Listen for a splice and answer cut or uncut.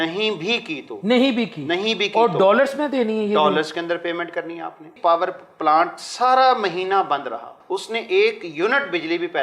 cut